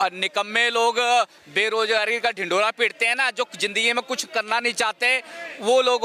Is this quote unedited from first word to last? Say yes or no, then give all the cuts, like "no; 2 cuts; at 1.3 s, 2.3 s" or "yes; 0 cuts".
yes; 0 cuts